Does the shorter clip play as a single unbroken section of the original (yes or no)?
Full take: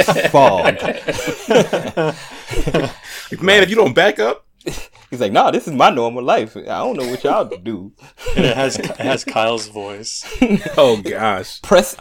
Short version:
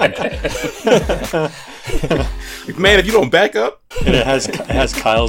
no